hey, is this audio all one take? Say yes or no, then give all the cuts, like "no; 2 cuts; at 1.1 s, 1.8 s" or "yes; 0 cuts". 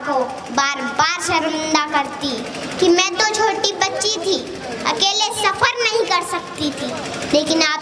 yes; 0 cuts